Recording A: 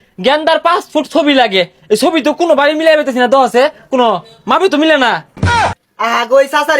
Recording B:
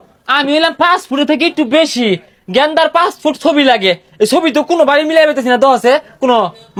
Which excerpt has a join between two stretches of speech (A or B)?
A